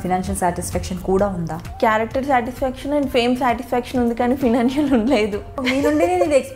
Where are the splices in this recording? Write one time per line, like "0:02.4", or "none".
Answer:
0:01.6
0:05.6